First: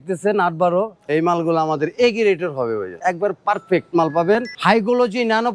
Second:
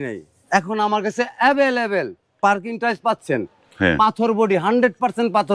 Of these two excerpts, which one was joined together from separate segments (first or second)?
first